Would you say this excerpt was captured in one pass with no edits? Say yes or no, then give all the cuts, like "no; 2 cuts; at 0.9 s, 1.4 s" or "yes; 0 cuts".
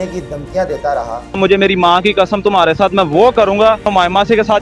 no; 2 cuts; at 1.2 s, 3.9 s